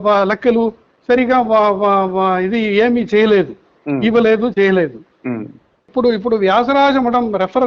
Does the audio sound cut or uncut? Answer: cut